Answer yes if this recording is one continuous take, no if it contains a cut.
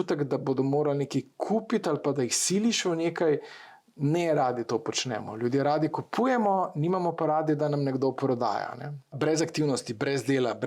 no